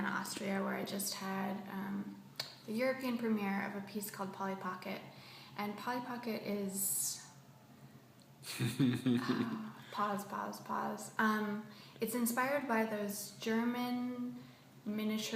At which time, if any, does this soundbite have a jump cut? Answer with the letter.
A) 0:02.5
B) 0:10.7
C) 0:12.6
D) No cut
B